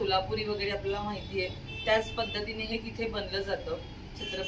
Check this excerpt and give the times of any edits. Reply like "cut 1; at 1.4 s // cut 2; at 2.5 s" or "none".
none